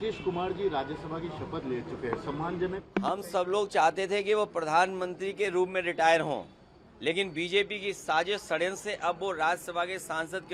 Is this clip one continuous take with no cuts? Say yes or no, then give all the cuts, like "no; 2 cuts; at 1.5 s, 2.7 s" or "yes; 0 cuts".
yes; 0 cuts